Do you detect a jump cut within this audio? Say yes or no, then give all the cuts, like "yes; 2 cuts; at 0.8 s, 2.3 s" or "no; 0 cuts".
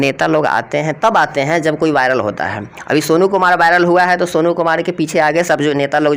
no; 0 cuts